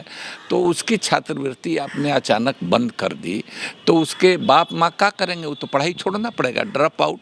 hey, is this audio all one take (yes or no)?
yes